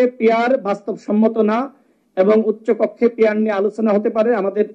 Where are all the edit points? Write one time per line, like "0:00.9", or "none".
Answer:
none